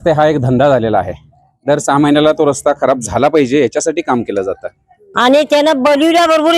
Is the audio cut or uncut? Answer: cut